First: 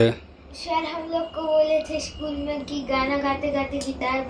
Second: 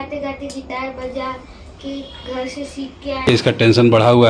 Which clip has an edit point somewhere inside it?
second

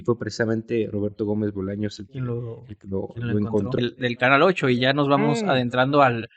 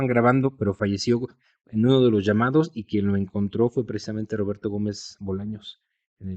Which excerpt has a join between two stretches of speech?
first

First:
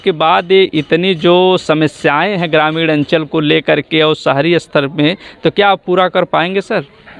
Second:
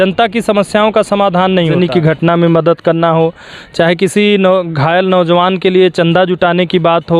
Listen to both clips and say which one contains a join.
second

